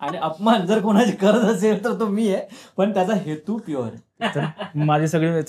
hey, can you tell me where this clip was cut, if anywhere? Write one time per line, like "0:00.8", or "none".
0:04.0